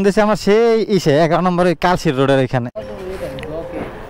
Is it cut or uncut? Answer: uncut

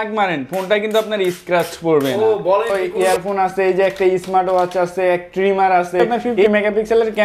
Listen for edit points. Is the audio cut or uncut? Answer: cut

